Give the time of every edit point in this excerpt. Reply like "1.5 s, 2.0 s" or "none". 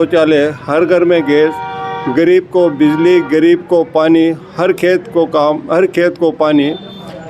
none